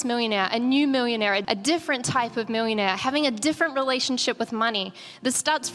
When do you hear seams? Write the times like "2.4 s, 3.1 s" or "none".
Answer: 1.4 s